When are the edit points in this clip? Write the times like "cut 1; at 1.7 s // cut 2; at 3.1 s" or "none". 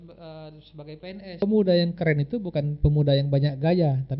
cut 1; at 1.4 s